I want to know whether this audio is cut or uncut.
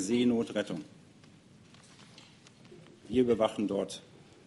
uncut